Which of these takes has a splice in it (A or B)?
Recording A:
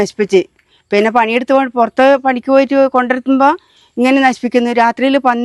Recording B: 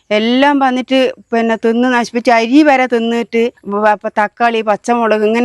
B